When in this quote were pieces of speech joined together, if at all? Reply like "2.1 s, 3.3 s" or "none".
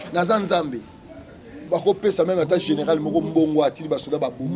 1.6 s